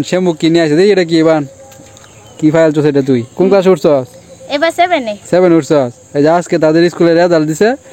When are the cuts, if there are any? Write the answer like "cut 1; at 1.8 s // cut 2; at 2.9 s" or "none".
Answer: cut 1; at 3.3 s